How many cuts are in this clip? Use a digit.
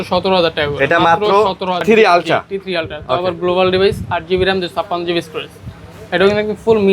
1